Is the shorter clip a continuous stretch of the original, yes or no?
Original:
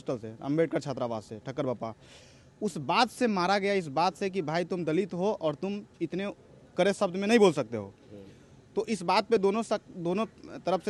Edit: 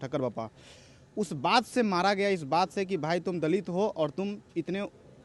yes